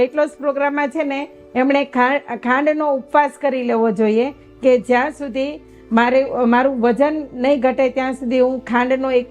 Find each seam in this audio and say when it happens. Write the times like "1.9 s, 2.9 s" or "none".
none